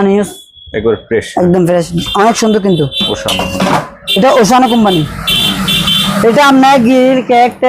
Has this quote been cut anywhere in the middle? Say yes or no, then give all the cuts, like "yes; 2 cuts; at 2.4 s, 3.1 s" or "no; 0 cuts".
no; 0 cuts